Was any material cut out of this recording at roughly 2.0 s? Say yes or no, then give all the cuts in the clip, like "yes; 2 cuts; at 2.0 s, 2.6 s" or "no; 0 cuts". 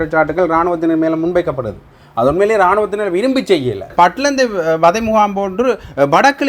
no; 1 cut; at 3.9 s